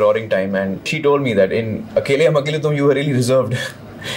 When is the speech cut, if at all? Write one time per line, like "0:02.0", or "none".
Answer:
0:00.9